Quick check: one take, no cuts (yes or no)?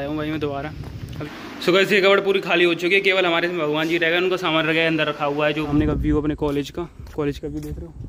no